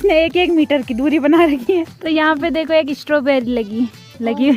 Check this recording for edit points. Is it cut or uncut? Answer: cut